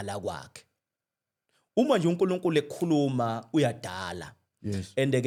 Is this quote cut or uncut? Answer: uncut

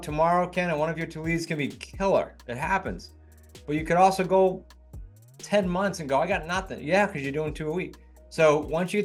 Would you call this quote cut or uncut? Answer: uncut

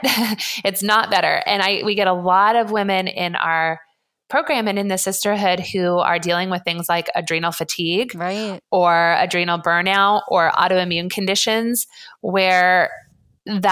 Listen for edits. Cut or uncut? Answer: uncut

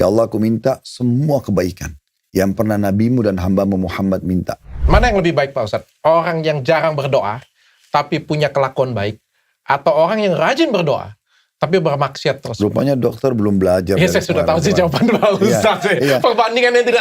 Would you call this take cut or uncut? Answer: cut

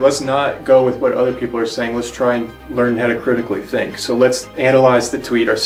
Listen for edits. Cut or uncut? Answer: uncut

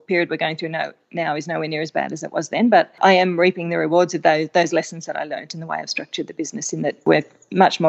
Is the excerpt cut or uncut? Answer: cut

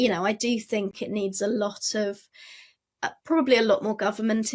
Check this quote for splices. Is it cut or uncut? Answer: cut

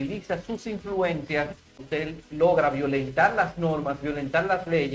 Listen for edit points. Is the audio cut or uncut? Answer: cut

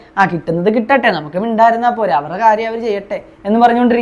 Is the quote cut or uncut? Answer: uncut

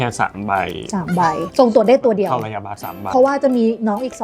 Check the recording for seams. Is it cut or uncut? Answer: cut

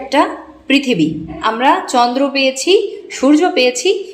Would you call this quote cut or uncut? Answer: cut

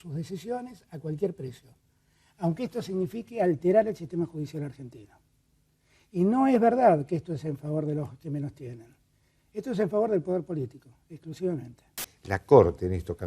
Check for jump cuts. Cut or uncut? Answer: cut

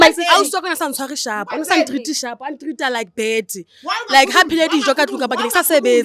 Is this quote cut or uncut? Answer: uncut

